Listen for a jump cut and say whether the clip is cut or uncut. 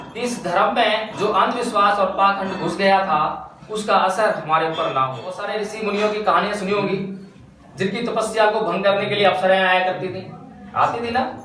cut